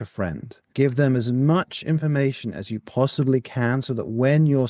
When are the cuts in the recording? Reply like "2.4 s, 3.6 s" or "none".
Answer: none